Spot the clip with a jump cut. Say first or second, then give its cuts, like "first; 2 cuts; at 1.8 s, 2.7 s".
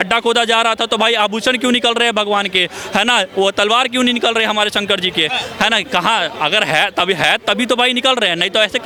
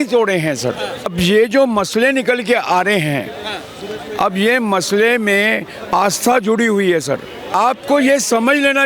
second; 2 cuts; at 1.1 s, 7.5 s